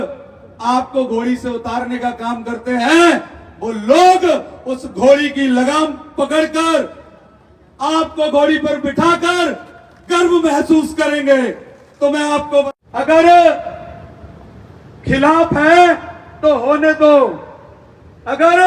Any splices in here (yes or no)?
yes